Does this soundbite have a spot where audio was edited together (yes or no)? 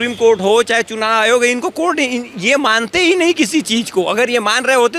no